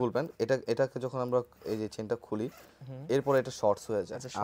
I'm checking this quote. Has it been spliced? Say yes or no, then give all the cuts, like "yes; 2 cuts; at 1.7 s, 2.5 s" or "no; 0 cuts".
no; 0 cuts